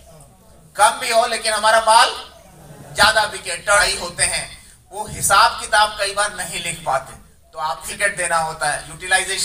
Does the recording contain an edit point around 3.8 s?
yes; 2 cuts; at 3.8 s, 7.9 s

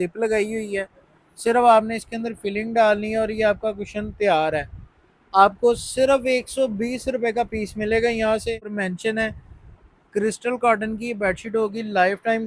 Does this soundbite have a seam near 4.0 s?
no; 1 cut; at 8.7 s

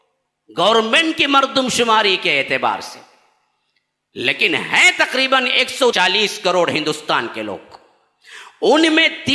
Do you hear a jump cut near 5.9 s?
yes; 1 cut; at 5.9 s

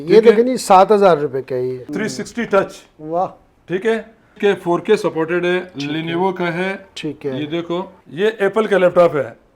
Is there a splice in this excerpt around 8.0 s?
yes; 3 cuts; at 1.9 s, 4.3 s, 8.0 s

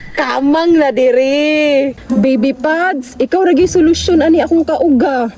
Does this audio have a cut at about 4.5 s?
no; 1 cut; at 2.0 s

